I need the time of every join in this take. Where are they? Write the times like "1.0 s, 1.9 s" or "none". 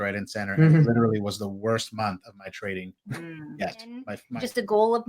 4.1 s